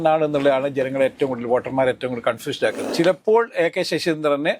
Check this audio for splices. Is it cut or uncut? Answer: cut